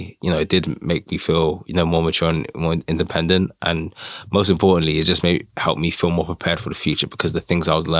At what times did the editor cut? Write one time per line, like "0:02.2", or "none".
none